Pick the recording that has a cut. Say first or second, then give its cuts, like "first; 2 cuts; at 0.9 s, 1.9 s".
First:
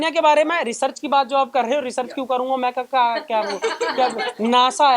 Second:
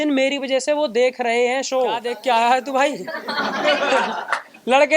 second; 1 cut; at 2.1 s